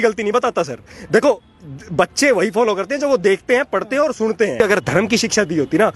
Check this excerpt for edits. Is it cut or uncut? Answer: cut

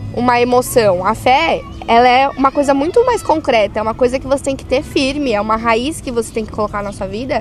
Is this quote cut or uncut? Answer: uncut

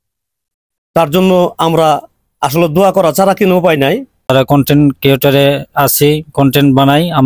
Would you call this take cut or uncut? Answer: cut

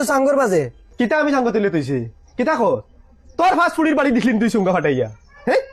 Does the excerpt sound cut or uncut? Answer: uncut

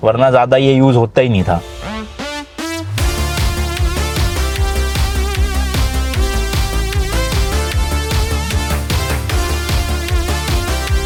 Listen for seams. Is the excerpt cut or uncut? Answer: uncut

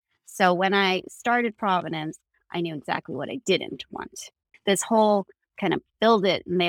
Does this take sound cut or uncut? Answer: cut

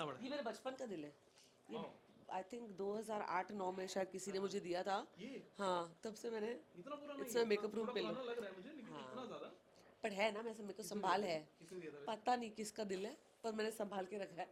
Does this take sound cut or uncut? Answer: uncut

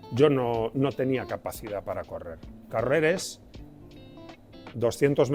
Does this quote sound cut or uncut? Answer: uncut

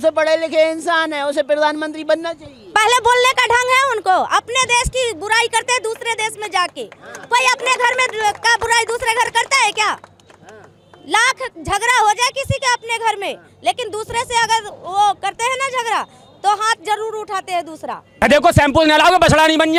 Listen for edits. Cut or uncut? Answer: uncut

